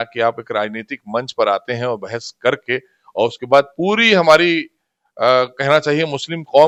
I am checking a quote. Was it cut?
no; 0 cuts

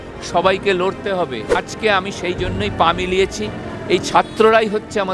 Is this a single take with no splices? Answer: no; 1 cut; at 1.6 s

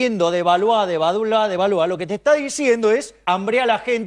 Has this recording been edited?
yes; 1 cut; at 3.1 s

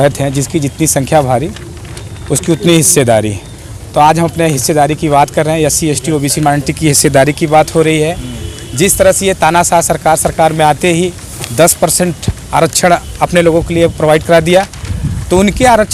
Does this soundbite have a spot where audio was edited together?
no; 0 cuts

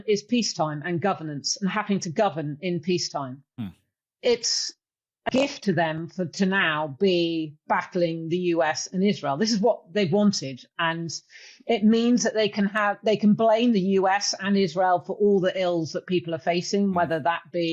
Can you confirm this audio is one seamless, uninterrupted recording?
no; 1 cut; at 3.9 s

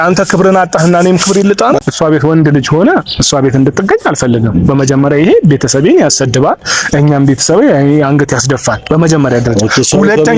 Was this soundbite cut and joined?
yes; 1 cut; at 1.8 s

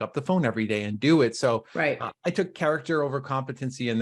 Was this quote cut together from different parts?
no; 0 cuts

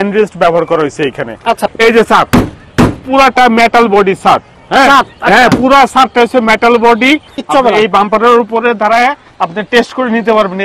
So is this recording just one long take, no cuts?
no; 2 cuts; at 1.6 s, 7.3 s

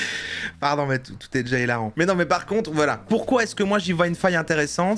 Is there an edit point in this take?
yes; 1 cut; at 1.9 s

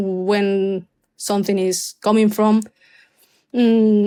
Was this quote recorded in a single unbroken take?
yes; 0 cuts

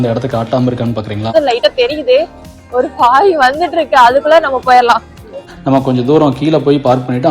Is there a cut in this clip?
yes; 2 cuts; at 1.3 s, 5.4 s

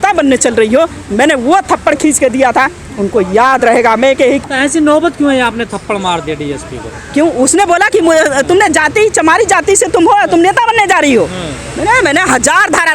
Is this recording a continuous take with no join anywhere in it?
no; 1 cut; at 4.5 s

